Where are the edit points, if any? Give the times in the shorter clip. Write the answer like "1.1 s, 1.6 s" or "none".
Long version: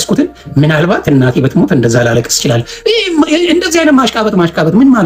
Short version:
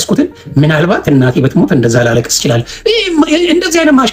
none